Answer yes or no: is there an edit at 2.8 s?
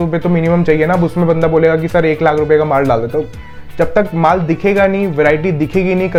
no